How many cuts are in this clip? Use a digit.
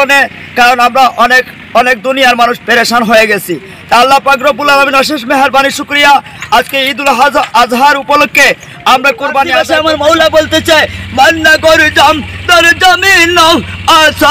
1